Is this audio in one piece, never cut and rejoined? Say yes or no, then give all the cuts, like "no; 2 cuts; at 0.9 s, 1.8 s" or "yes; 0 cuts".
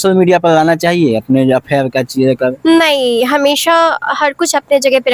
yes; 0 cuts